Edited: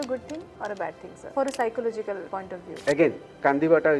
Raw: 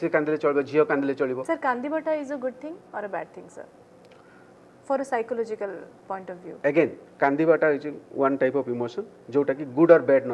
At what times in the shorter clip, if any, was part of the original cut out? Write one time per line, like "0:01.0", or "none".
0:01.1
0:02.3